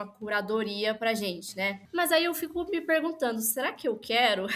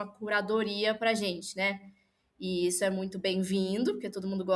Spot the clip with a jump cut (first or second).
first